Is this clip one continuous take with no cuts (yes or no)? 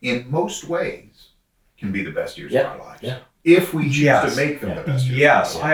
yes